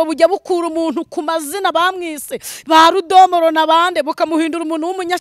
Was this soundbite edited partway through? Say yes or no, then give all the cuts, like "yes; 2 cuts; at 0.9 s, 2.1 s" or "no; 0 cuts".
no; 0 cuts